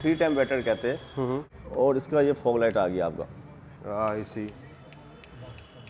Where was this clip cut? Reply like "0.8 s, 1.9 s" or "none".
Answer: 1.6 s

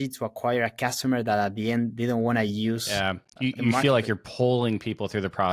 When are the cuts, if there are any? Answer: none

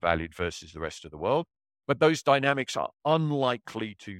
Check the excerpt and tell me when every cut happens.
none

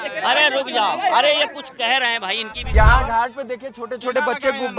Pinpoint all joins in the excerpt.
2.7 s

